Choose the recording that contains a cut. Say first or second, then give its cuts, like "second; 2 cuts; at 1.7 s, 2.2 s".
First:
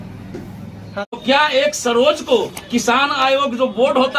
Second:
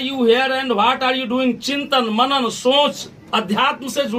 first; 1 cut; at 1.1 s